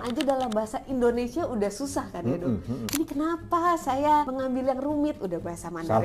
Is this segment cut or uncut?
cut